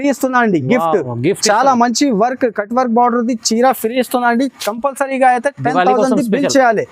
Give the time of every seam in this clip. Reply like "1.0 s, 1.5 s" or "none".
none